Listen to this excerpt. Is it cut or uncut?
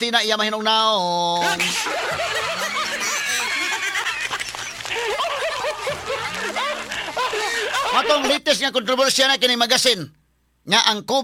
uncut